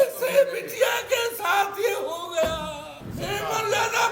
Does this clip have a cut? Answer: yes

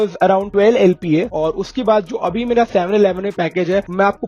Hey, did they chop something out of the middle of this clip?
yes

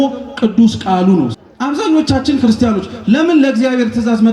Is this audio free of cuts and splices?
no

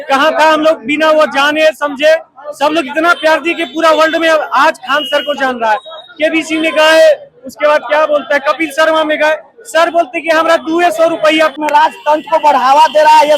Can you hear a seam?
yes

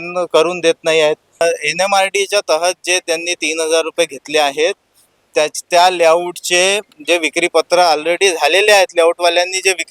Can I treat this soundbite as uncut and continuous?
no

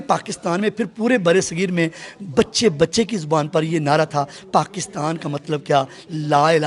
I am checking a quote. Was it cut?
no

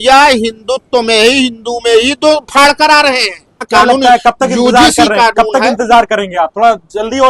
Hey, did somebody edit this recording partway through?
yes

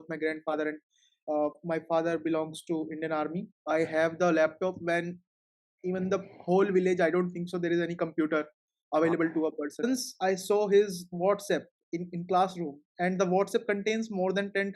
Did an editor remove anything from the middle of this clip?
yes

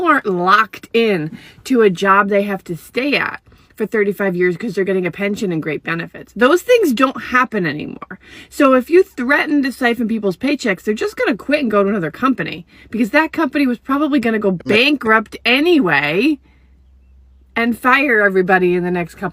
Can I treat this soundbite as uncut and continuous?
yes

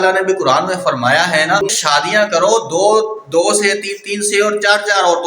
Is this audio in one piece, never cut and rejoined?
no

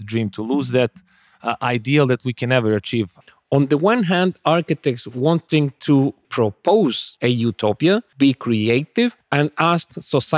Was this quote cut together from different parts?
yes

